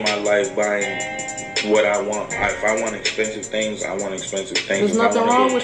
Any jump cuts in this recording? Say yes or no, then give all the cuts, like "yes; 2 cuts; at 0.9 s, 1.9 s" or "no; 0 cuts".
no; 0 cuts